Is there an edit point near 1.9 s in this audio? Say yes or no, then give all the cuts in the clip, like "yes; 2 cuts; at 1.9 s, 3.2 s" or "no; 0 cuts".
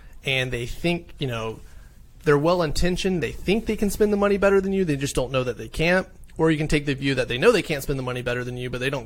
no; 0 cuts